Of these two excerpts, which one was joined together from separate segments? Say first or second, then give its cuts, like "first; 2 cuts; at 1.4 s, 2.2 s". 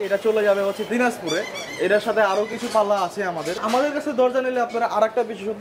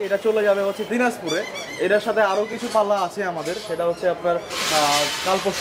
first; 1 cut; at 3.6 s